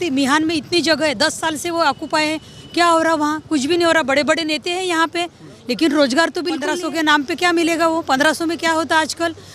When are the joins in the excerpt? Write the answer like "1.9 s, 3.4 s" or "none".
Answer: 6.8 s